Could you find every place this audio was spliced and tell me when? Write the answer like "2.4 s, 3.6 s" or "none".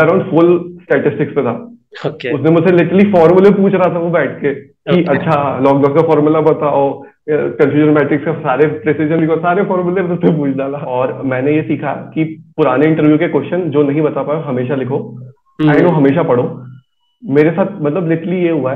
10.8 s